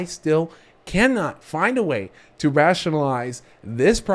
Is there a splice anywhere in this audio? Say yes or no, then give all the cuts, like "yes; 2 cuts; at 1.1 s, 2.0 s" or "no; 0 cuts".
no; 0 cuts